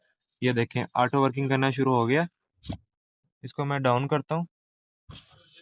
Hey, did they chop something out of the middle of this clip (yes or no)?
no